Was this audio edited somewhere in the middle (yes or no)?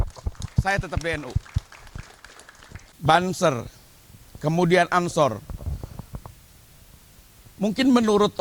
yes